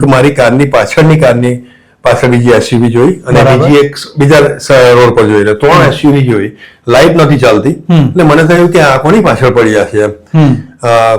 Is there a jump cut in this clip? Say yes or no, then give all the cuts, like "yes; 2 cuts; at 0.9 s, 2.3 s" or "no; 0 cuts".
no; 0 cuts